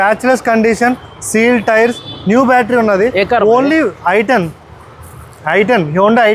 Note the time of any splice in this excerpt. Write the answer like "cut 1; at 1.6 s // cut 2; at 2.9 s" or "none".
none